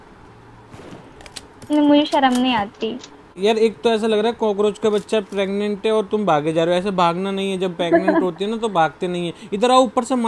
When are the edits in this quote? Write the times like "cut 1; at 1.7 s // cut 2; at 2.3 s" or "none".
cut 1; at 3.2 s